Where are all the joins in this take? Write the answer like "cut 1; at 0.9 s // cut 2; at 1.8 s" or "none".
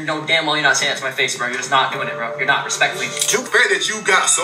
cut 1; at 3.5 s